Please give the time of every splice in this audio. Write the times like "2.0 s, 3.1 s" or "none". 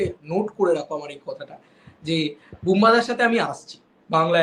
none

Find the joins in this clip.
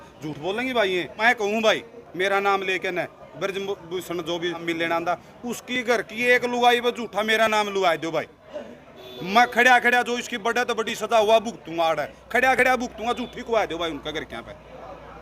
1.2 s, 4.6 s

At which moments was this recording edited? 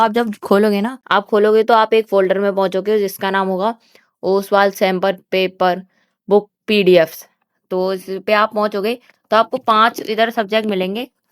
1.0 s

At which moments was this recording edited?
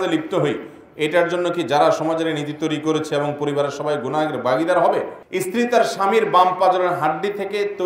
5.2 s

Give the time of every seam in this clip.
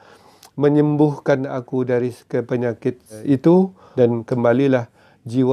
3.2 s, 3.8 s

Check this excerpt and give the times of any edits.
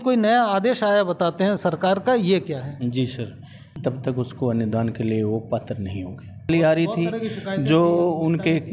3.7 s, 6.5 s

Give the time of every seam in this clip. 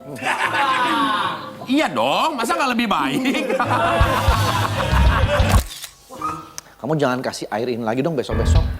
5.6 s

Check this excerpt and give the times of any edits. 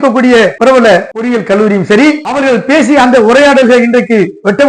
0.8 s, 2.3 s

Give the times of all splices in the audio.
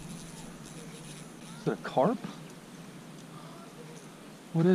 1.4 s

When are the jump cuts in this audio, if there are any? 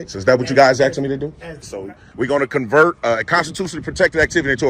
1.6 s

